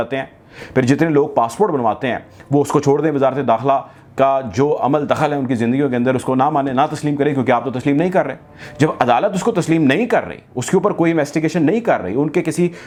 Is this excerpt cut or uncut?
uncut